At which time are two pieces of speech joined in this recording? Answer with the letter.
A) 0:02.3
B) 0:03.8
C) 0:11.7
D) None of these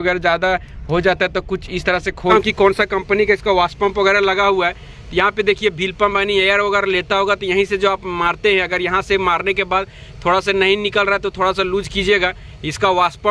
A